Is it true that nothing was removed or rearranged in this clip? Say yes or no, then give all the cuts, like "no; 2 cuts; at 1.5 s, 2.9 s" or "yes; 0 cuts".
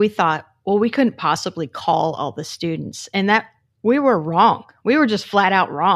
yes; 0 cuts